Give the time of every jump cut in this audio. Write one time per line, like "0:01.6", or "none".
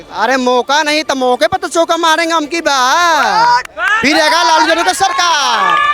none